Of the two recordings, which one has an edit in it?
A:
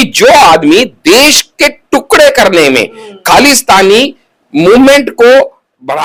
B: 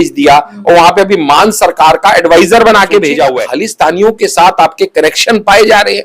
B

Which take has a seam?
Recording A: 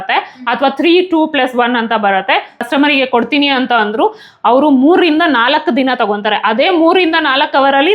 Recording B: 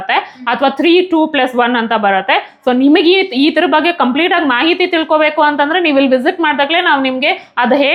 A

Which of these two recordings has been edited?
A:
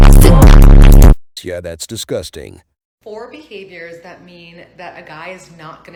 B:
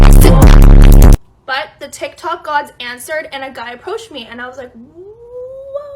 B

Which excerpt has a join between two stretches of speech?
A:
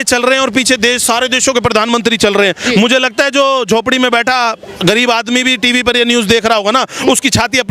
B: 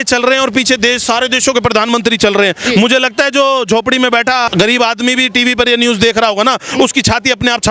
B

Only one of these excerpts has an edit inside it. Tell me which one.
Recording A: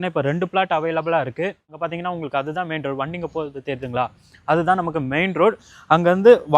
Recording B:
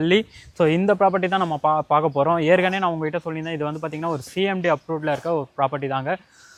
A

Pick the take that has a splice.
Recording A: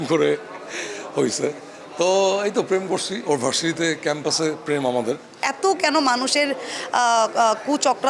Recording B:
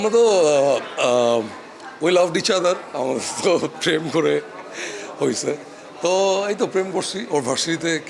A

